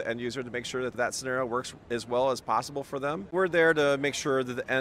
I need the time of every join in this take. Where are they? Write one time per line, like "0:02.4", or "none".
0:01.0
0:03.3